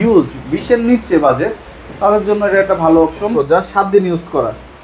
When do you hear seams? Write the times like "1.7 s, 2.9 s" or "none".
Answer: 3.3 s